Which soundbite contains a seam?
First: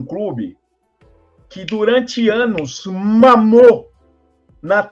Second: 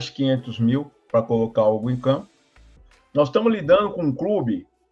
second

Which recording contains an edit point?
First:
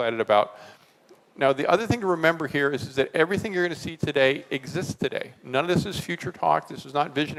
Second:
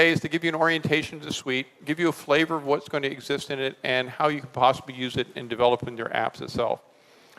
second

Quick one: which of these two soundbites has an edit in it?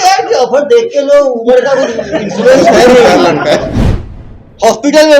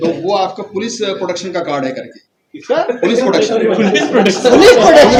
first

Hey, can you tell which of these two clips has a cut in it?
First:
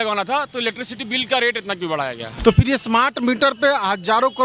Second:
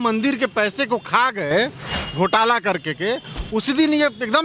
first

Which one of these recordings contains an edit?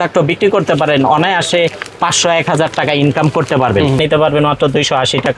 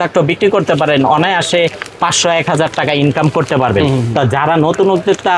first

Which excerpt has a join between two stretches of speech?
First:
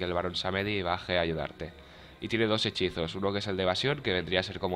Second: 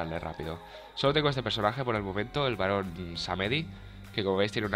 second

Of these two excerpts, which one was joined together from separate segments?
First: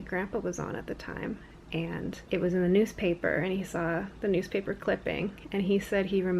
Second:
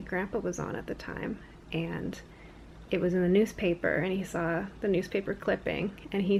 first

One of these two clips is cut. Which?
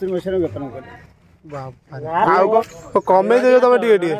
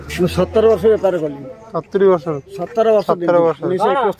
first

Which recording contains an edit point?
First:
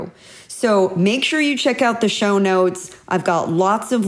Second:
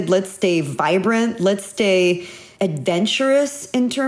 second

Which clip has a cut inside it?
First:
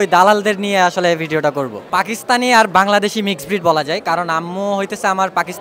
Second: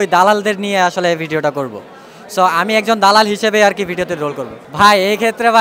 first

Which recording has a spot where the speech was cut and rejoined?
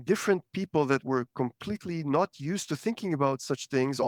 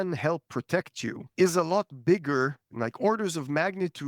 second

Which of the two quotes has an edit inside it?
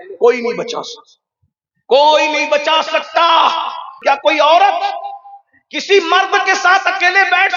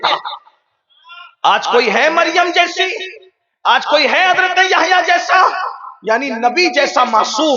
first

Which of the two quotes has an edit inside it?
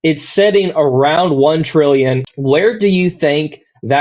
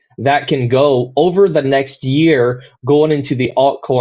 first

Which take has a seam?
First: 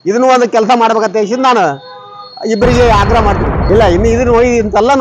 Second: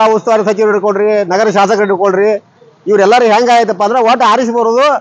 first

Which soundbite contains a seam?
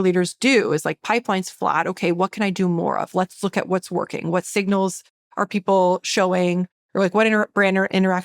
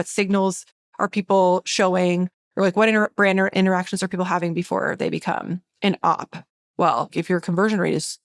second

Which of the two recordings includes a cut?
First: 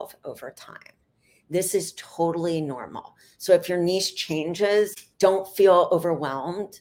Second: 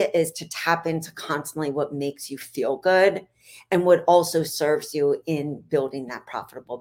first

